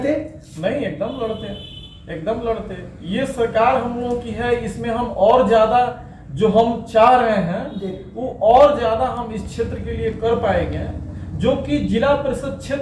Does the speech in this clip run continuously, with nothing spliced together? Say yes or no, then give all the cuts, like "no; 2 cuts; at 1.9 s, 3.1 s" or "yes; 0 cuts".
yes; 0 cuts